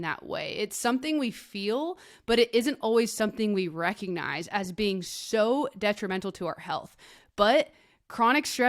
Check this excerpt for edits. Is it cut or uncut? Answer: uncut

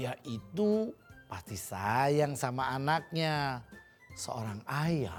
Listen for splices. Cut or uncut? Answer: uncut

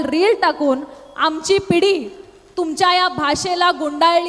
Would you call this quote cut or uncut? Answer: uncut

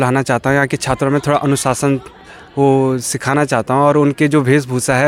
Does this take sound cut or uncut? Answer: uncut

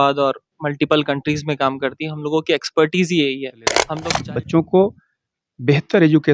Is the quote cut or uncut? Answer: cut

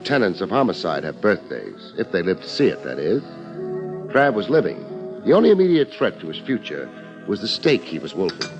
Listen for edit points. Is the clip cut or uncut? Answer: cut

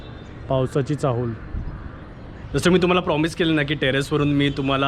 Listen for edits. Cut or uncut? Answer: cut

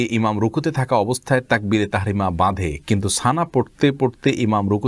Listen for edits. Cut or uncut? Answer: uncut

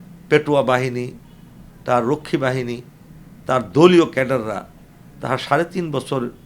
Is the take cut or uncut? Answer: uncut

